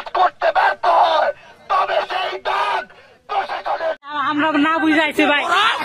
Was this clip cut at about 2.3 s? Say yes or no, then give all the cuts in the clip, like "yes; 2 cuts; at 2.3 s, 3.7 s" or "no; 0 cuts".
no; 1 cut; at 4.1 s